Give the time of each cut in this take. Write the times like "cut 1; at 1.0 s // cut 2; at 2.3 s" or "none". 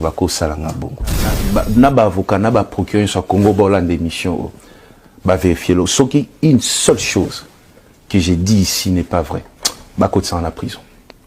cut 1; at 1.4 s